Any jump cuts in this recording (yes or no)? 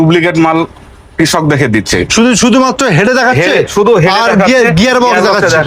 no